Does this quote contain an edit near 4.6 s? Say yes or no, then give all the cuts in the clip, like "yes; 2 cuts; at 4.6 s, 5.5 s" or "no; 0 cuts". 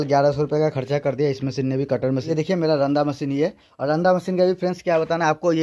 no; 1 cut; at 2.3 s